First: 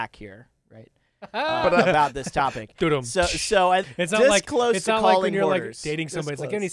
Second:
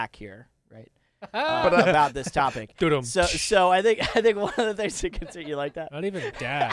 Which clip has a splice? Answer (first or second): first